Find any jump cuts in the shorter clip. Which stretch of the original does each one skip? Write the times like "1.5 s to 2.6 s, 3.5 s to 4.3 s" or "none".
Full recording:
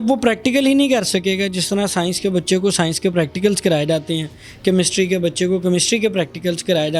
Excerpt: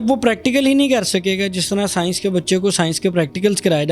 none